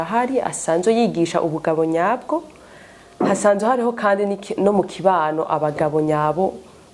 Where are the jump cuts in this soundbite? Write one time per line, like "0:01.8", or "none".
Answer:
none

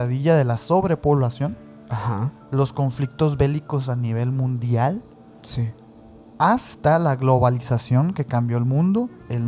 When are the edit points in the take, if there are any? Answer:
none

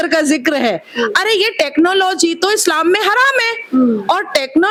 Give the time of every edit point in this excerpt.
none

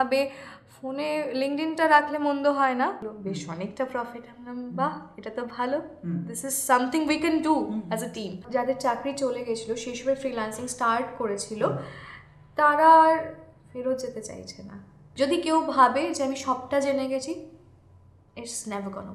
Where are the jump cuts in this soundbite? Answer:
0:03.0
0:08.4
0:15.0

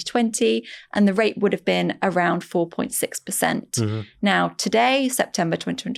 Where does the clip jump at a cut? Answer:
none

